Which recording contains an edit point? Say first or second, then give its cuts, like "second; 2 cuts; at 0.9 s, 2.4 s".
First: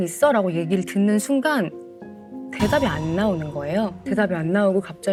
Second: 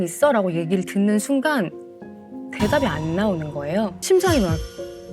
second; 1 cut; at 4.0 s